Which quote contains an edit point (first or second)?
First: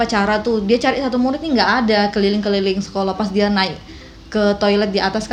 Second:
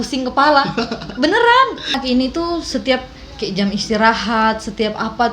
second